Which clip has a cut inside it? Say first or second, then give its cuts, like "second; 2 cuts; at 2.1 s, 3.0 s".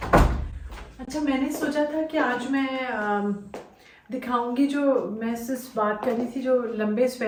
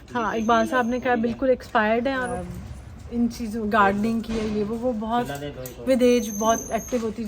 second; 1 cut; at 2.3 s